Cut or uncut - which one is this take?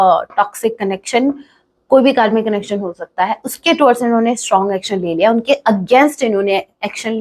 uncut